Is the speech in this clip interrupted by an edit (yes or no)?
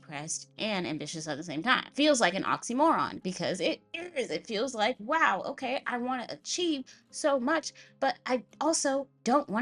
no